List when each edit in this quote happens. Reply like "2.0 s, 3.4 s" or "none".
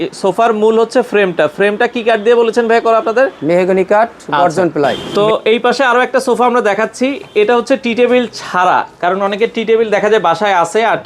5.0 s